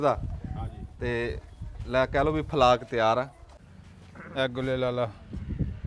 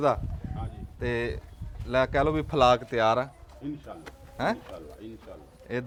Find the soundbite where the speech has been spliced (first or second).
first